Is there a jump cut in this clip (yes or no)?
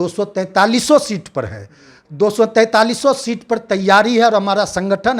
no